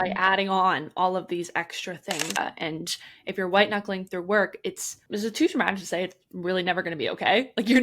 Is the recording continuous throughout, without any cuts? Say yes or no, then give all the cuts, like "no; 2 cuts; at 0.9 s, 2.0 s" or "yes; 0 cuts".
no; 2 cuts; at 2.3 s, 4.9 s